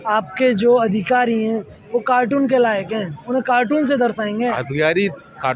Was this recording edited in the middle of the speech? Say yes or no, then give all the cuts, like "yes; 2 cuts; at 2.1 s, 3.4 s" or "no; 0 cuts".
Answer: no; 0 cuts